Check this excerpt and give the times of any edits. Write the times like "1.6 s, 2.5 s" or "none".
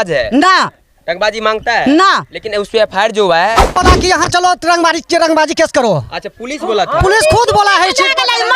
3.6 s